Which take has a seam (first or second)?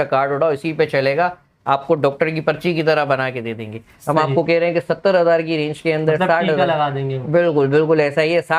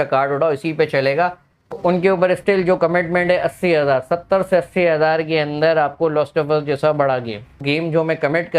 second